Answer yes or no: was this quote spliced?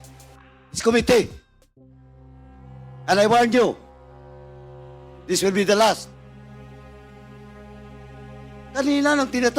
yes